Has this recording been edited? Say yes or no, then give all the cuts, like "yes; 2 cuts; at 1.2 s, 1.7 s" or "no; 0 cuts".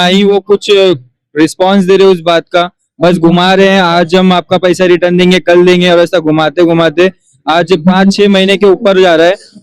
no; 0 cuts